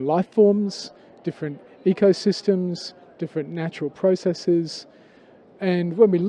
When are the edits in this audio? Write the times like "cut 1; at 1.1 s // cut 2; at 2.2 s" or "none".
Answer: none